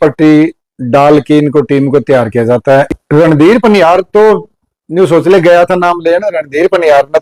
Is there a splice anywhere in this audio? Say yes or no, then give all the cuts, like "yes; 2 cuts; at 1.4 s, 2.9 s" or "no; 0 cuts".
yes; 1 cut; at 2.9 s